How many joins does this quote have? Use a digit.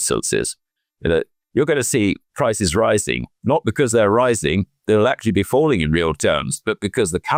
0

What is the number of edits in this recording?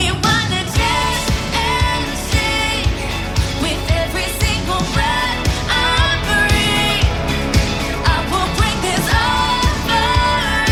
0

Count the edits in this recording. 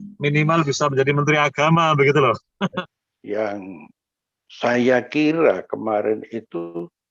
1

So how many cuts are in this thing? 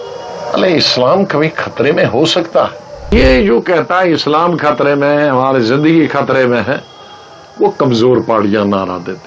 1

